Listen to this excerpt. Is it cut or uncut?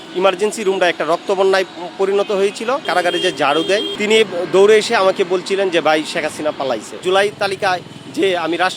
cut